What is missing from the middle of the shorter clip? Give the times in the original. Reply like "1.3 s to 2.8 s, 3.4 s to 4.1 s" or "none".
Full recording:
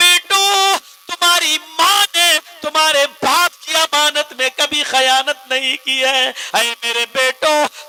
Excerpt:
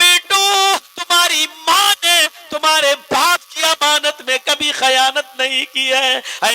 0.9 s to 1.0 s